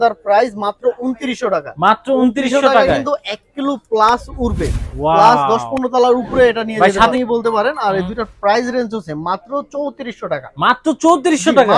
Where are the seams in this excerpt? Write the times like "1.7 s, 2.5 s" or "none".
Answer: 7.1 s